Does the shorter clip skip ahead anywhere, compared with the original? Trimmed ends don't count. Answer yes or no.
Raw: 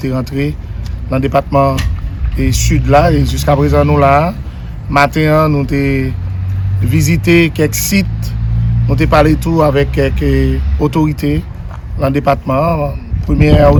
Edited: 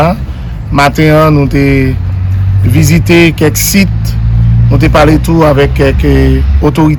no